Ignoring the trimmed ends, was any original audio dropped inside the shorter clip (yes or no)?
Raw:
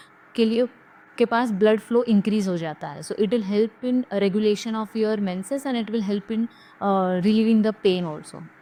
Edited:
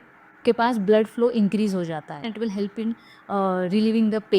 yes